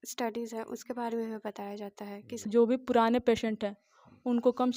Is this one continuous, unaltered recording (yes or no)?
no